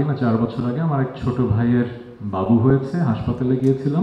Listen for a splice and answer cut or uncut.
uncut